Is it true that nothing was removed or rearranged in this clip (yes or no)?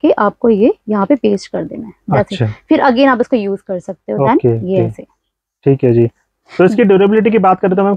yes